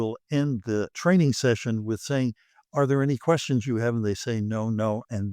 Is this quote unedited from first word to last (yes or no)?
no